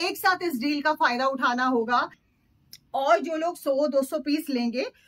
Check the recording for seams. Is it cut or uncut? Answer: cut